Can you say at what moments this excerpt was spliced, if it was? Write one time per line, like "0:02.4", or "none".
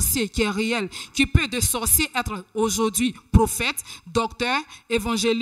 none